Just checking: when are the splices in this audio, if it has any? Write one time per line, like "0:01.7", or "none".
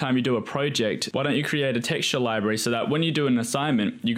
0:01.0